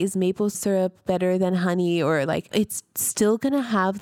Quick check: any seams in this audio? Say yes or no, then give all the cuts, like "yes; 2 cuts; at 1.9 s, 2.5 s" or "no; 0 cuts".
yes; 1 cut; at 2.5 s